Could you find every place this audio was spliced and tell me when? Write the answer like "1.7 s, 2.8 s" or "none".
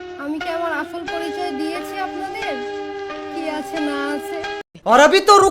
4.6 s